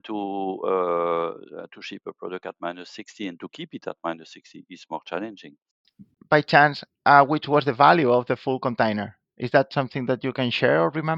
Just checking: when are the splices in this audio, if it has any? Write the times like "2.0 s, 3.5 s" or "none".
5.8 s